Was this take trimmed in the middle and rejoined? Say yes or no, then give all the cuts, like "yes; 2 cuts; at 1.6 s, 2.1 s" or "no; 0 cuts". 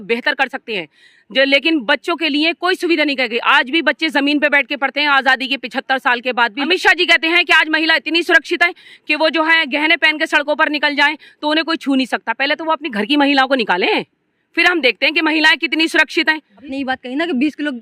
yes; 2 cuts; at 6.7 s, 16.7 s